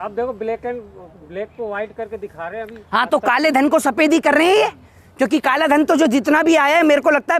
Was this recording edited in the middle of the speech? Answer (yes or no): no